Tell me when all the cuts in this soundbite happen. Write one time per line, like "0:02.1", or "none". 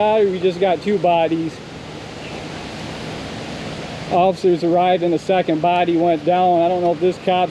none